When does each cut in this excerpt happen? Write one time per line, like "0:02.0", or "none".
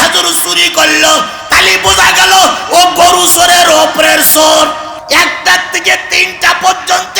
0:05.0